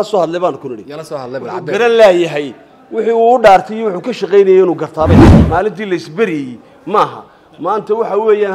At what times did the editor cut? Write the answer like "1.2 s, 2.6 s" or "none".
5.2 s